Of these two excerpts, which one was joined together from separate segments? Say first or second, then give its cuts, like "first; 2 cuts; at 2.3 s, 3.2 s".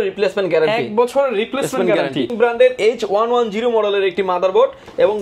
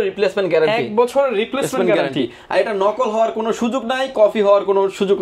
first; 1 cut; at 2.3 s